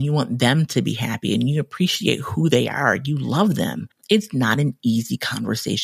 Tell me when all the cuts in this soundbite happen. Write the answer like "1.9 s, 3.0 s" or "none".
3.9 s